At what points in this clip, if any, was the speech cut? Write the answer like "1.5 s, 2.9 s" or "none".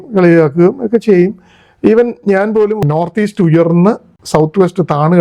2.8 s